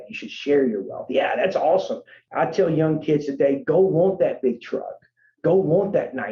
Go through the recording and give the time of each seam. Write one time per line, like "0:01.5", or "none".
0:02.2

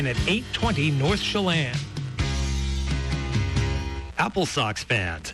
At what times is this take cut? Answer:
0:04.0

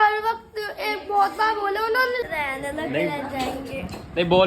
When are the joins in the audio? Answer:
0:02.2

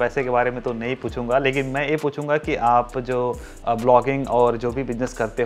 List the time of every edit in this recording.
none

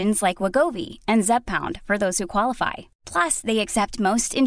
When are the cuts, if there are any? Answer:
none

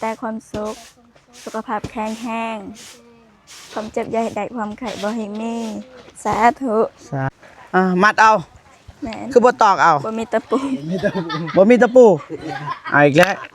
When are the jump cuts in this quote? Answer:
0:07.3

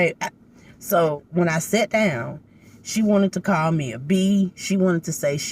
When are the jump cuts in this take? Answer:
0:01.1

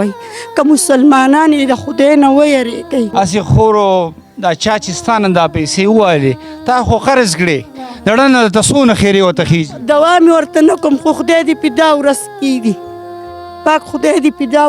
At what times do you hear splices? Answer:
0:03.1

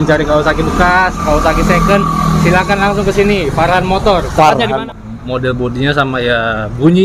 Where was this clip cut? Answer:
0:04.8

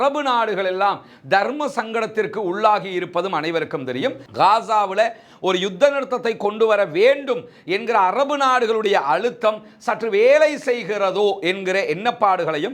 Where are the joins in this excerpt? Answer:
0:04.3

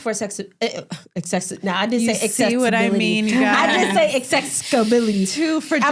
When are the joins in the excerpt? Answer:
none

